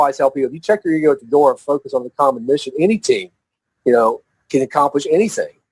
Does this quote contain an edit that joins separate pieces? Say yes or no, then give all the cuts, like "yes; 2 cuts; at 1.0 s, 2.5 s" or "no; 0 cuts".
no; 0 cuts